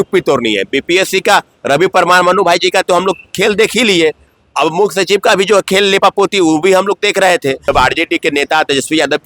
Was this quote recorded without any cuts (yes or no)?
no